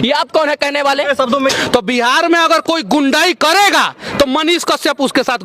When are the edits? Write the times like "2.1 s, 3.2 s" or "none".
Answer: 1.5 s